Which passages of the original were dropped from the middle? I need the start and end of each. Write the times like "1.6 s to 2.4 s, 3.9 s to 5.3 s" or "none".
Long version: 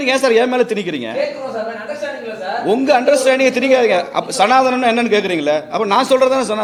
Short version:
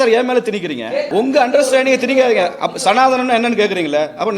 1.3 s to 2.6 s